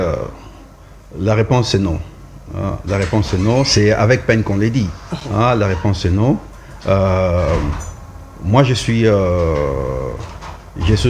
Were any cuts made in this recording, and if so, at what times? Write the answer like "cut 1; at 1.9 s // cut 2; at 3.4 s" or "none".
none